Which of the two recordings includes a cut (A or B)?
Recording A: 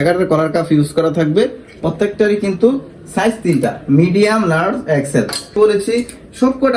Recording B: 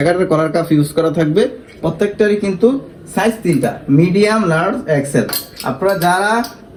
A